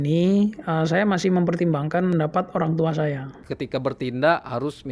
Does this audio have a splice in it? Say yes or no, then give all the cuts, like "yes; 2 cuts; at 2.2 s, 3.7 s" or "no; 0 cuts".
yes; 2 cuts; at 2.1 s, 3.4 s